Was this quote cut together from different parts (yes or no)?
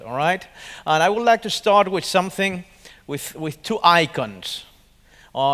no